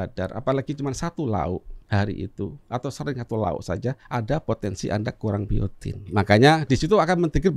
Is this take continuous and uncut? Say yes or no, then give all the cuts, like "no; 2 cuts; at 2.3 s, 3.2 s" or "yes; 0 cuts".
no; 4 cuts; at 1.7 s, 2.6 s, 4.0 s, 6.1 s